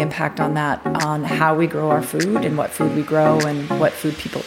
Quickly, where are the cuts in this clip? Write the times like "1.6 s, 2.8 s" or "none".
none